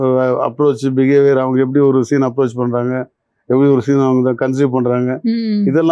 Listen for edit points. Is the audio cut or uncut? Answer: uncut